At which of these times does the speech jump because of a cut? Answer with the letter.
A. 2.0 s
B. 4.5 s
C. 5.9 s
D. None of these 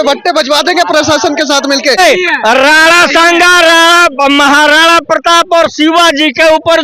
A